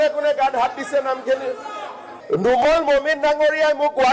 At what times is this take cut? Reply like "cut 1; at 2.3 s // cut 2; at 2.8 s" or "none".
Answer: cut 1; at 2.1 s

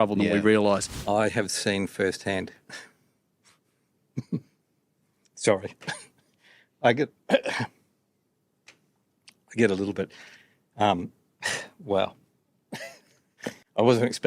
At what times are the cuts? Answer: cut 1; at 0.9 s

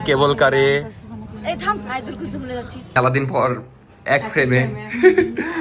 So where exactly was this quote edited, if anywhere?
cut 1; at 2.9 s

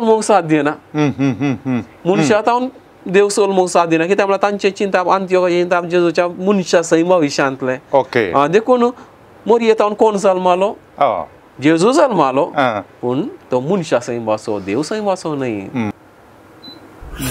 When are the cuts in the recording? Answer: cut 1; at 15.9 s

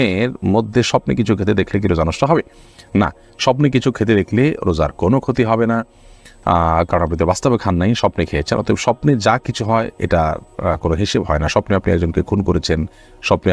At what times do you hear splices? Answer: none

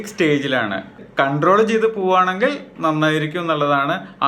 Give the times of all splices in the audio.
cut 1; at 1.0 s

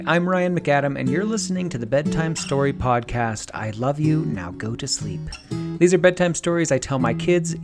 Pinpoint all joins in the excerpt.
none

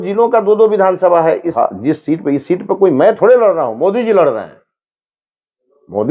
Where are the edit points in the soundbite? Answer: cut 1; at 1.5 s

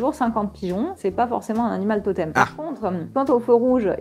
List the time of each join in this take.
cut 1; at 1.0 s // cut 2; at 2.5 s

